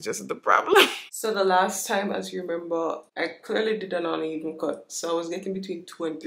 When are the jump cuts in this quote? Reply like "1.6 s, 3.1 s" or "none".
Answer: 1.0 s, 3.0 s